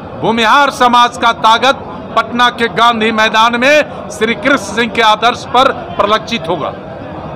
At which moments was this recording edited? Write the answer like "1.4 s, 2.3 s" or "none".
none